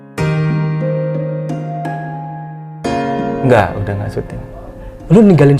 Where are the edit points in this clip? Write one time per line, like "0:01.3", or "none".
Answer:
0:03.4